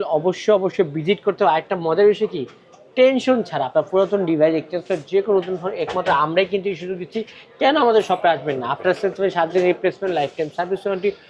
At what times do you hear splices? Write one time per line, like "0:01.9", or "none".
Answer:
none